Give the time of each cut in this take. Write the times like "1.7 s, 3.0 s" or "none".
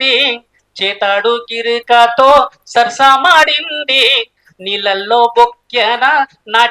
none